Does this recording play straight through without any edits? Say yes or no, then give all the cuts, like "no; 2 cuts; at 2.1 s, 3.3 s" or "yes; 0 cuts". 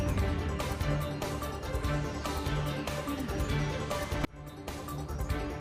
yes; 0 cuts